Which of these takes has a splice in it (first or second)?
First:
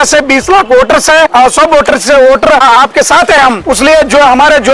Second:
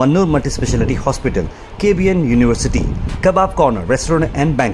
first